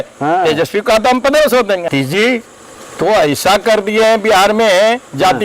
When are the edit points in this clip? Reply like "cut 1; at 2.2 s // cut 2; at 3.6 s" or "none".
cut 1; at 1.9 s